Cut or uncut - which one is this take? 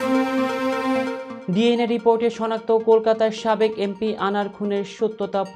uncut